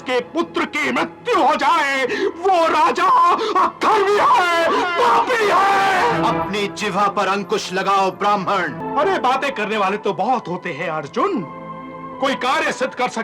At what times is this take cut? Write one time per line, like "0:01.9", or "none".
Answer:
0:06.1
0:08.8